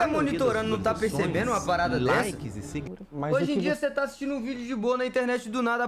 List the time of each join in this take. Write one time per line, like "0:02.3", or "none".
0:02.9